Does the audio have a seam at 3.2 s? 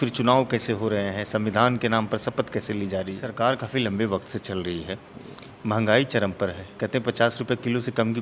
yes; 1 cut; at 3.2 s

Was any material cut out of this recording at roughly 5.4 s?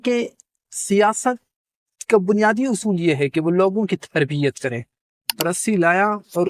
yes; 1 cut; at 5.4 s

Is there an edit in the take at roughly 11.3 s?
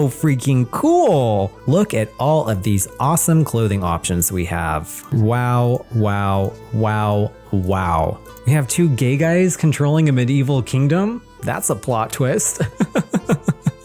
no; 2 cuts; at 1.6 s, 8.3 s

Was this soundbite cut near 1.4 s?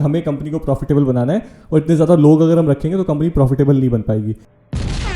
no; 0 cuts

